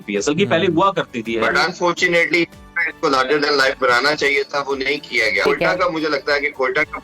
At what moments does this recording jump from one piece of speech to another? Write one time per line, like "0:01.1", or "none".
0:01.5
0:05.4